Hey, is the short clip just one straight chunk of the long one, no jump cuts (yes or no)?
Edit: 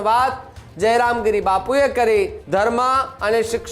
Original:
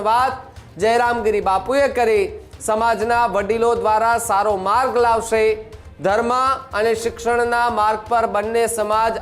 no